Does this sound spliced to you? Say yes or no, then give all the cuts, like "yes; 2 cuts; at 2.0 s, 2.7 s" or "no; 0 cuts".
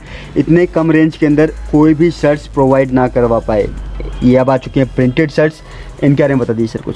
no; 0 cuts